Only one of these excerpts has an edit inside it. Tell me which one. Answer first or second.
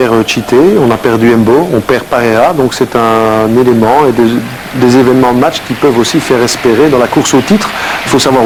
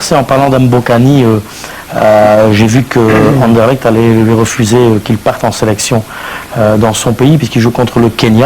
second